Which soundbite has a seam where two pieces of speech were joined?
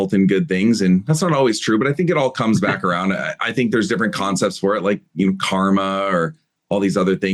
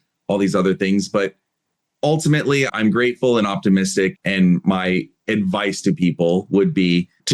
second; 1 cut; at 2.7 s

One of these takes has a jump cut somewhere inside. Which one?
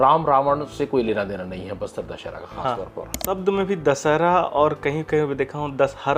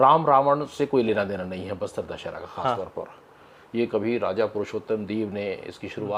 first; 1 cut; at 3.2 s

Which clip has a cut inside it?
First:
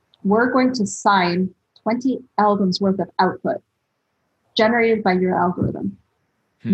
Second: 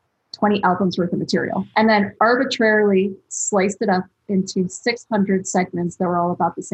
second; 1 cut; at 1.7 s

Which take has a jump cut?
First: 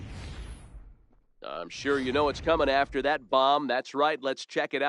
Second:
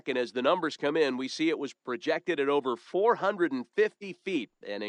first; 1 cut; at 1.2 s

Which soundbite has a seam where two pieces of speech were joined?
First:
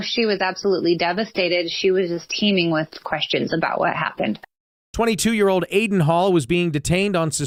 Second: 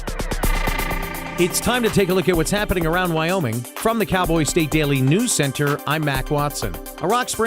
second; 1 cut; at 1.0 s

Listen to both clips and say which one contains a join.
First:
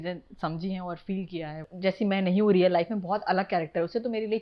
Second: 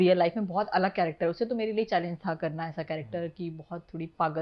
first; 1 cut; at 1.6 s

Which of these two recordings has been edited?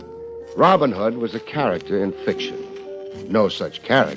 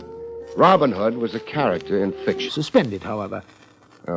first; 1 cut; at 2.5 s

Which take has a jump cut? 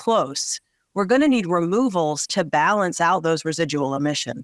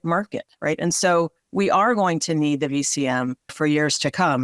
second; 2 cuts; at 1.4 s, 3.5 s

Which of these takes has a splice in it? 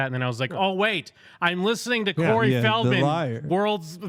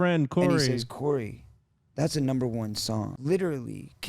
second; 1 cut; at 3.1 s

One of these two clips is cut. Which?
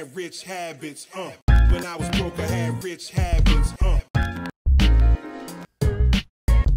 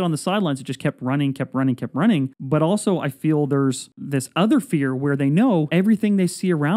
second; 3 cuts; at 2.4 s, 3.9 s, 5.7 s

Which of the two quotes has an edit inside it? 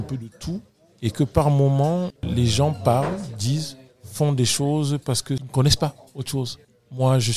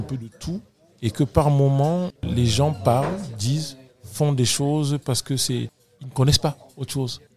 first; 1 cut; at 5.4 s

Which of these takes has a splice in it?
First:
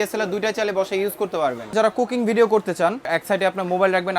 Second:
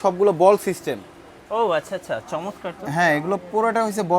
first; 2 cuts; at 1.7 s, 3.1 s

